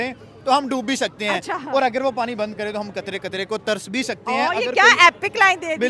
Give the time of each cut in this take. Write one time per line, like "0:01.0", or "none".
none